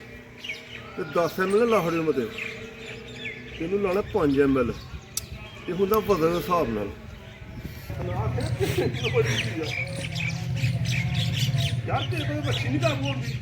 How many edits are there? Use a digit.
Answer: 1